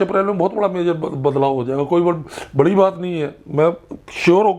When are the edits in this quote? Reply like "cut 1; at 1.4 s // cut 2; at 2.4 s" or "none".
none